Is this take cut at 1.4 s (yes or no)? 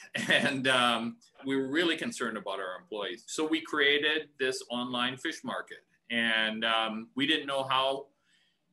yes